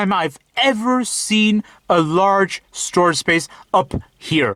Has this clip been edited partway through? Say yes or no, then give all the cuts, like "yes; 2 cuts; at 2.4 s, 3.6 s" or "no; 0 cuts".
no; 0 cuts